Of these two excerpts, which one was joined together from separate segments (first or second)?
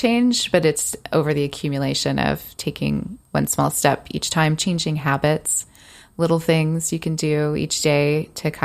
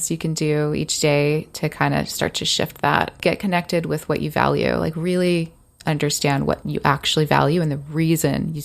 second